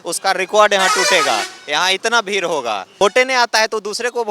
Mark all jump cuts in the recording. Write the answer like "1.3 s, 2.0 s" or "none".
3.0 s